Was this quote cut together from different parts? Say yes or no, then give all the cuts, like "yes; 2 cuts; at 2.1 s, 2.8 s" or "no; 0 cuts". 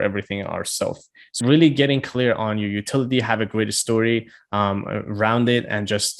yes; 1 cut; at 1.2 s